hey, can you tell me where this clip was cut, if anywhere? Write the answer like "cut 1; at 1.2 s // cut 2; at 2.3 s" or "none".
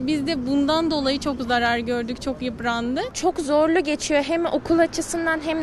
cut 1; at 3.1 s